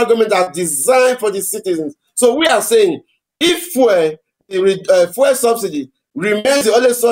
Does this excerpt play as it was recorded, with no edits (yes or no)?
yes